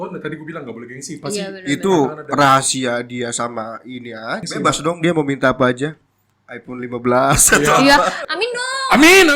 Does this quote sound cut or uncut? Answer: cut